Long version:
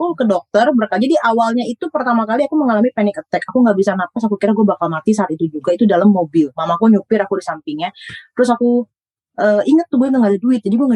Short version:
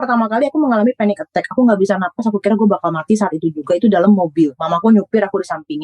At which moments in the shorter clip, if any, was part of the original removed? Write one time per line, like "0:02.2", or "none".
none